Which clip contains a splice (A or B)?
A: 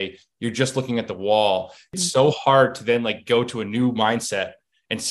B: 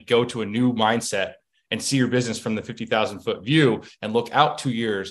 A